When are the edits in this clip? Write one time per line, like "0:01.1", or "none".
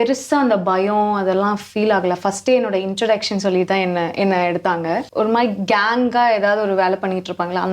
0:05.1